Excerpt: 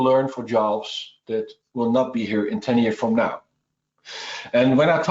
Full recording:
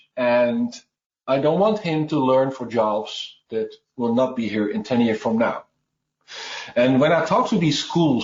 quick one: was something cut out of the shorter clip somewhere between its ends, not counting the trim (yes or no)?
no